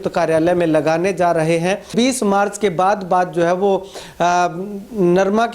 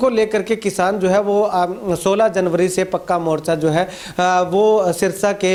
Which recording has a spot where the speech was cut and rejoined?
first; 1 cut; at 1.9 s

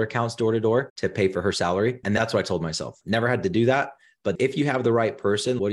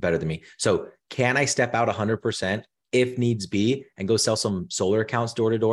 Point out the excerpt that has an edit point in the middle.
first; 1 cut; at 4.3 s

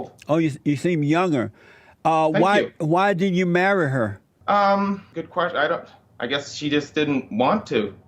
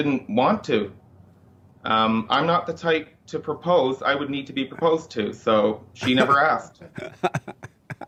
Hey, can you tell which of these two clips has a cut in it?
first; 3 cuts; at 4.3 s, 5.1 s, 6.0 s

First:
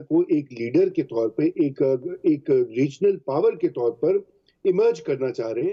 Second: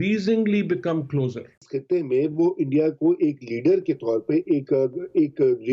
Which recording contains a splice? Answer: second; 1 cut; at 1.7 s

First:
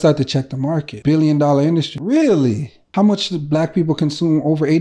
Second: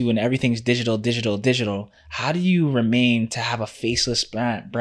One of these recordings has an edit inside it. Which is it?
first; 3 cuts; at 0.9 s, 1.9 s, 2.7 s

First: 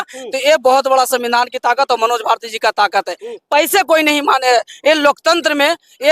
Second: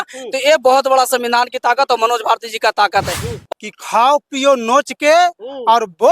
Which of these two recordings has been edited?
second; 1 cut; at 3.4 s

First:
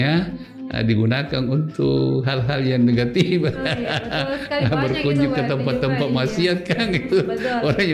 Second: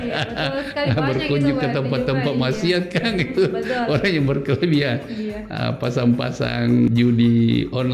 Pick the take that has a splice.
second; 1 cut; at 6.9 s

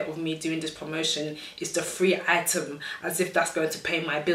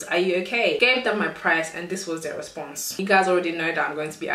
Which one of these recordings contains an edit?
second; 2 cuts; at 0.8 s, 3.0 s

